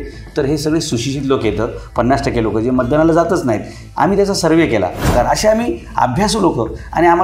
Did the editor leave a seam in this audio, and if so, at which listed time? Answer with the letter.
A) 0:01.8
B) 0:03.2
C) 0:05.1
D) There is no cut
C